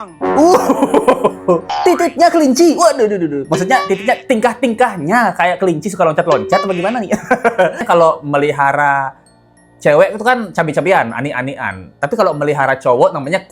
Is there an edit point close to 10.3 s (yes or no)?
no